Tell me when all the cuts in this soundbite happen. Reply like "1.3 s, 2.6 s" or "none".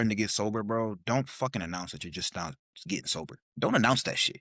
3.4 s

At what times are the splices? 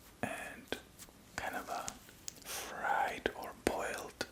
none

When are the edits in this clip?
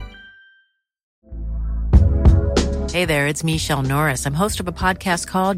1.0 s

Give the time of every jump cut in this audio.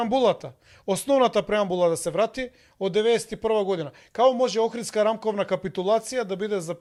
none

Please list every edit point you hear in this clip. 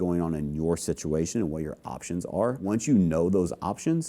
2.6 s

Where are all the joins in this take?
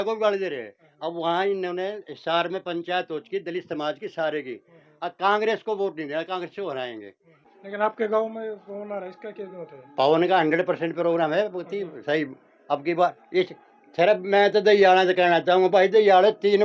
7.4 s

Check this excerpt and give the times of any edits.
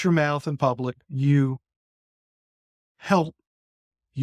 1.1 s

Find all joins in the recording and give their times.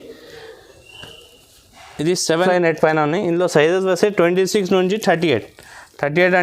2.4 s

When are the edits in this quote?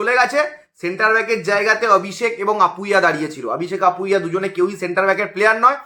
none

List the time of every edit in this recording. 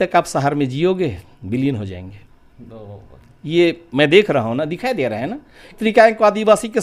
5.7 s

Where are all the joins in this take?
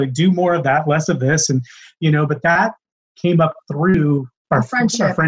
2.6 s, 4.0 s

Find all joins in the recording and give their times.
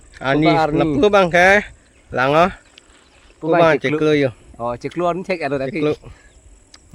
none

